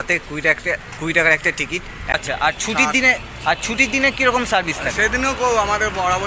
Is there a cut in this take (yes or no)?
yes